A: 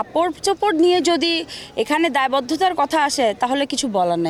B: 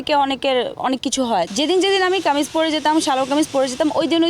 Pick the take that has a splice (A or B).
B